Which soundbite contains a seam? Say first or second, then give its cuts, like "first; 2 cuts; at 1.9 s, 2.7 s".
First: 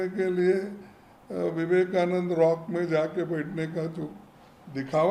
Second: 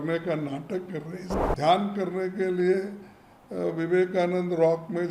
second; 1 cut; at 1.2 s